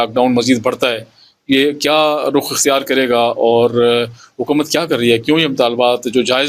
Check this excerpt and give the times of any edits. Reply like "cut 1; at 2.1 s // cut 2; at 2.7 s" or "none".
none